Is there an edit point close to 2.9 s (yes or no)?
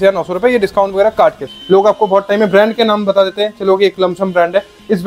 no